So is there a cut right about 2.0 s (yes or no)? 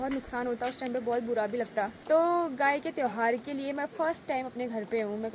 yes